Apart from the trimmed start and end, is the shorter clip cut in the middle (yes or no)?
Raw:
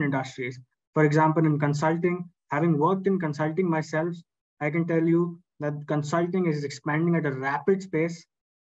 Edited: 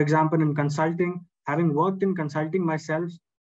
no